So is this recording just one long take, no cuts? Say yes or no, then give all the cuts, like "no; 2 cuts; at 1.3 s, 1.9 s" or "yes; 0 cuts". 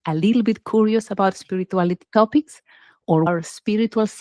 no; 1 cut; at 3.3 s